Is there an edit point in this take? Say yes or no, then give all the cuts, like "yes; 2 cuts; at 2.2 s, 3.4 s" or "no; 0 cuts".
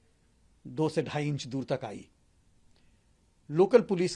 no; 0 cuts